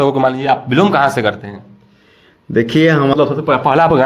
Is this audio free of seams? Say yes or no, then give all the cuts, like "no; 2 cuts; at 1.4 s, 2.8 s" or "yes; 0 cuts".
no; 1 cut; at 3.1 s